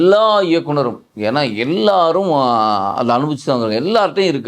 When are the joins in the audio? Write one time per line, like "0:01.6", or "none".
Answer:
0:01.0